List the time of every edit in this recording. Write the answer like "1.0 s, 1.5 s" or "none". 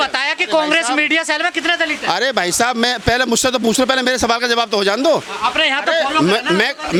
none